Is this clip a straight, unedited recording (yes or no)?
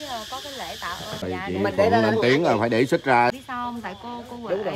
no